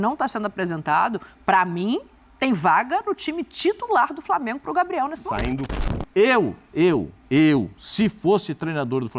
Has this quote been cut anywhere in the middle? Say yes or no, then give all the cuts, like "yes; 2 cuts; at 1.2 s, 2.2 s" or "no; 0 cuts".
yes; 1 cut; at 5.7 s